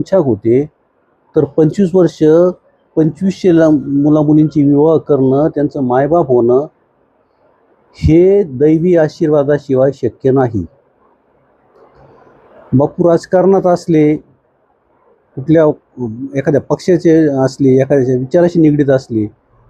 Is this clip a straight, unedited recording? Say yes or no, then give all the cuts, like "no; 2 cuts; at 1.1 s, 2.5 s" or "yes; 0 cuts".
yes; 0 cuts